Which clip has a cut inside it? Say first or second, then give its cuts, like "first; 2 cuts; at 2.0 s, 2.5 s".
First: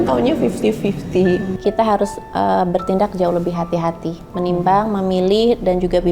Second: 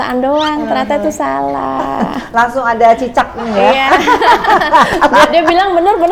first; 1 cut; at 1.5 s